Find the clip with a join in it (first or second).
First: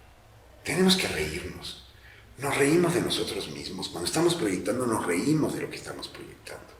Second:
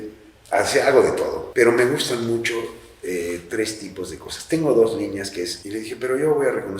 second